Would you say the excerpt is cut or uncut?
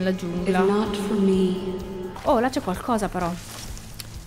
cut